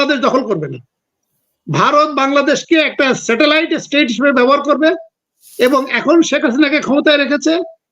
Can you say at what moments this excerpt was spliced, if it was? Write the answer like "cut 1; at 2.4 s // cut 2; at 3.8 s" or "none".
none